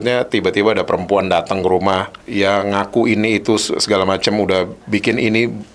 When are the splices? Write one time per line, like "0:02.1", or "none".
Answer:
0:02.2